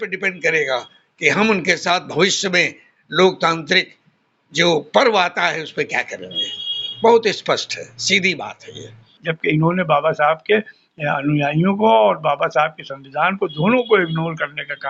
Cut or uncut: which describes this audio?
cut